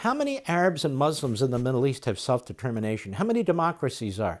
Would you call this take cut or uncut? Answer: uncut